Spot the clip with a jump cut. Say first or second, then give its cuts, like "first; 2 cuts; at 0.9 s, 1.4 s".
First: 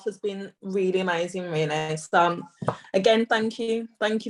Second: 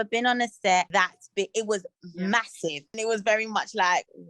second; 1 cut; at 2.9 s